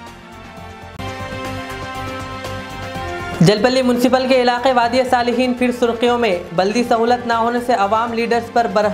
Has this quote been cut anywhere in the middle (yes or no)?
yes